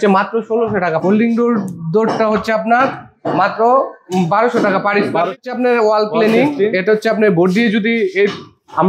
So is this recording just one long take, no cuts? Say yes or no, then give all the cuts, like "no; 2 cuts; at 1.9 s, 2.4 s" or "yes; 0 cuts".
no; 2 cuts; at 1.0 s, 5.4 s